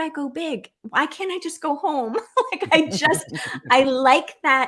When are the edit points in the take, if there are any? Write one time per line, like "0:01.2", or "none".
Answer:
none

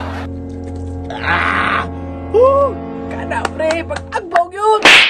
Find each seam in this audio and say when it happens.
none

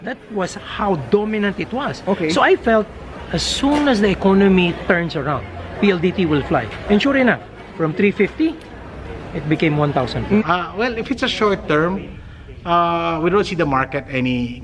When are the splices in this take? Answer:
0:10.4

